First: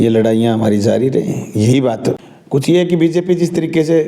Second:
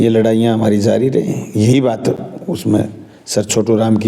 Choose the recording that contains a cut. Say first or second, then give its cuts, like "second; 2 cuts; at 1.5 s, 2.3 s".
first; 1 cut; at 2.3 s